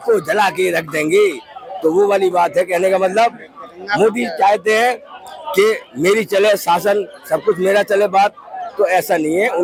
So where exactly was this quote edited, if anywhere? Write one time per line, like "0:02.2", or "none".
none